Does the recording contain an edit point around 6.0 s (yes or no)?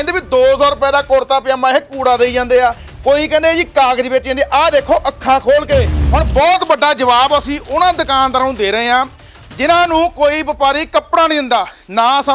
yes